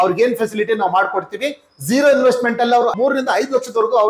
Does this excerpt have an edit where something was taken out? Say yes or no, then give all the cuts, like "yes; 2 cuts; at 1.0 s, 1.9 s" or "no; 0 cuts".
yes; 1 cut; at 2.9 s